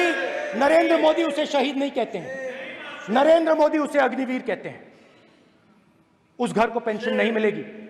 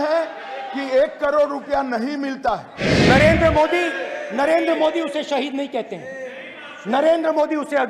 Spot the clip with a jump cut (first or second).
second